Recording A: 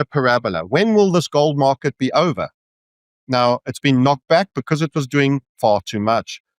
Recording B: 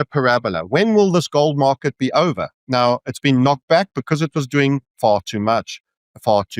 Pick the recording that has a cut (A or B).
B